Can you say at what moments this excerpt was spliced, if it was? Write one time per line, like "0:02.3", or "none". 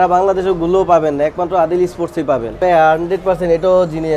0:02.6